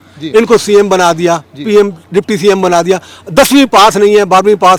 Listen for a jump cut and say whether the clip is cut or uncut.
uncut